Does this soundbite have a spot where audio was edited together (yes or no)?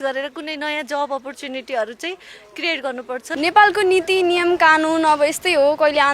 yes